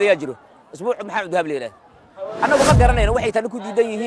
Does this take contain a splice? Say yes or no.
yes